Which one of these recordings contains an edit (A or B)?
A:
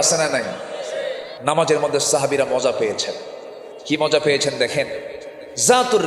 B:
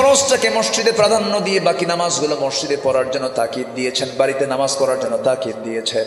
A